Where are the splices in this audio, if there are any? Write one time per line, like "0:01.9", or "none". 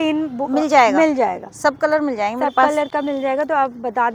none

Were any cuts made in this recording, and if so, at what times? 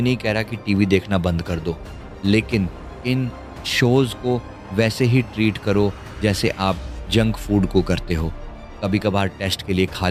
none

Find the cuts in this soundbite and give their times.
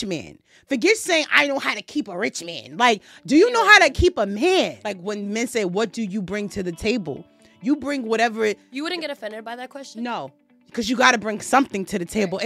0:04.9

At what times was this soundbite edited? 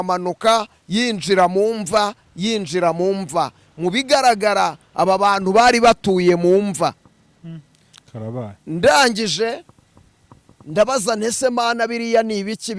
none

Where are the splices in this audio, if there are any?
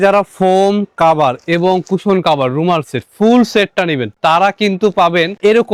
none

